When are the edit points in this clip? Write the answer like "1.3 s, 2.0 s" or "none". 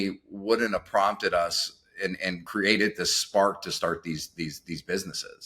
2.4 s